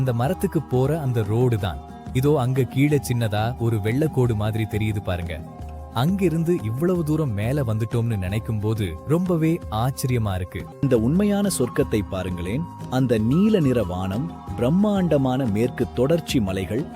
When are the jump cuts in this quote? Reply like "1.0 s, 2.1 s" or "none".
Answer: 10.7 s